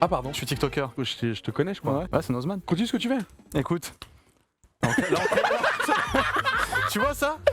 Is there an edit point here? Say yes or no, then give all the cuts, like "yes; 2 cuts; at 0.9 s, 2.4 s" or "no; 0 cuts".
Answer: yes; 2 cuts; at 0.9 s, 2.6 s